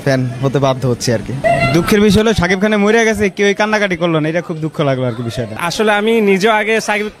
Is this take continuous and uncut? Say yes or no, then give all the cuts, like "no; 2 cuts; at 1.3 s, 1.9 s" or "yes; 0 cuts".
no; 2 cuts; at 1.4 s, 5.6 s